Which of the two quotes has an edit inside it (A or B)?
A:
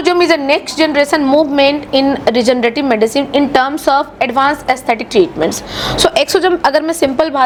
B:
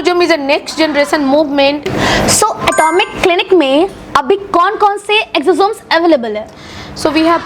B